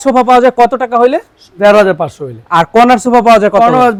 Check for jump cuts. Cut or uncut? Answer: uncut